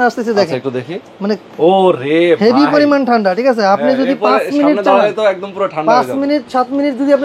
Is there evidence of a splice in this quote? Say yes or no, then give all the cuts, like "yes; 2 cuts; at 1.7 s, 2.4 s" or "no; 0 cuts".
no; 0 cuts